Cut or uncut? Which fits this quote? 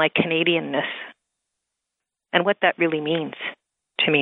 cut